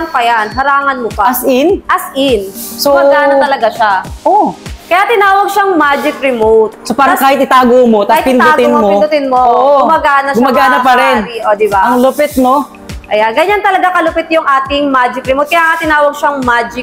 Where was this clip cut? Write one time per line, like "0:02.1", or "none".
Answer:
none